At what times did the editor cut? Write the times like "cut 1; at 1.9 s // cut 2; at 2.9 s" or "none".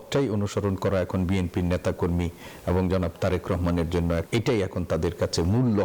cut 1; at 4.3 s